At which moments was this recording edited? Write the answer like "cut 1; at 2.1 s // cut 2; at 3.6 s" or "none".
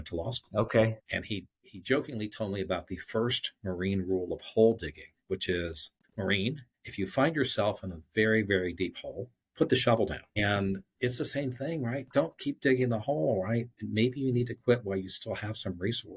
none